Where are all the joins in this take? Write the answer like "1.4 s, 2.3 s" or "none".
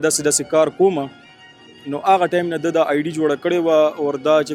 none